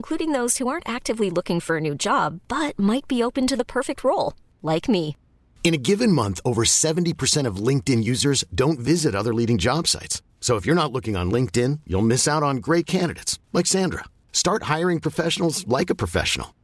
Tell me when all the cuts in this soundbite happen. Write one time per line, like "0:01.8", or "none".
none